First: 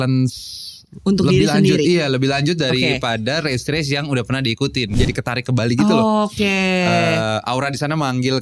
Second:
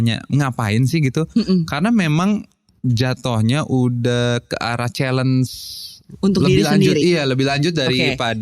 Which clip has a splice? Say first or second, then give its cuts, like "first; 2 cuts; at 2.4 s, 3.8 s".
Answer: first; 1 cut; at 4.9 s